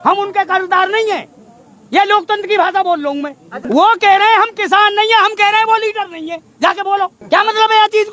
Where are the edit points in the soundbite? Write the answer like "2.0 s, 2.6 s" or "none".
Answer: 3.7 s, 7.2 s

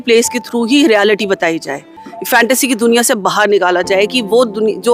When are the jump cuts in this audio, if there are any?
none

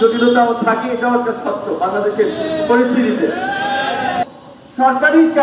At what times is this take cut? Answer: 4.3 s

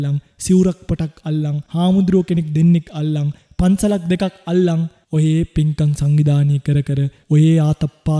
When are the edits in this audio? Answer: 1.6 s, 5.0 s, 7.1 s

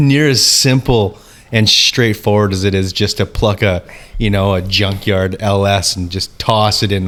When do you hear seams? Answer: none

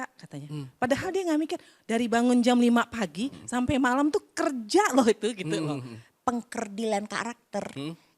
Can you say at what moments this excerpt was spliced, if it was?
6.0 s

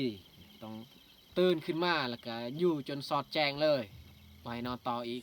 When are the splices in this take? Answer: none

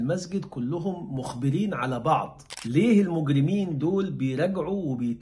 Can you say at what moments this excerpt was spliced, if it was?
2.5 s

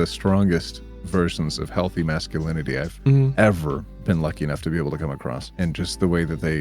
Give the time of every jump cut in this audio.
5.4 s

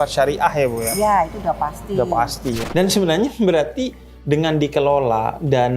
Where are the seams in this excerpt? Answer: 2.6 s

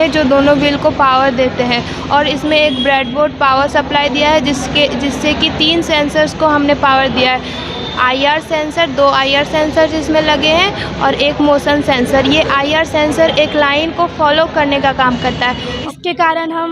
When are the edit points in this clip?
15.8 s

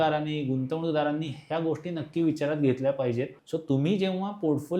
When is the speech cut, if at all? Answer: 3.4 s

